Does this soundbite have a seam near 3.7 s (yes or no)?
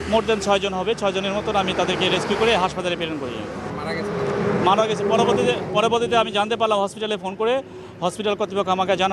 yes